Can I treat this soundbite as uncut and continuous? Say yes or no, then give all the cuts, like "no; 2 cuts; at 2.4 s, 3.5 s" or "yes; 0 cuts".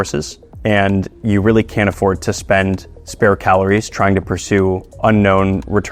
yes; 0 cuts